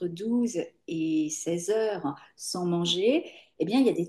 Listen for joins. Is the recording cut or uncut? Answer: uncut